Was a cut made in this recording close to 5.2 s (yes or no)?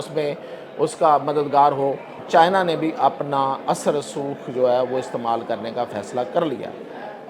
no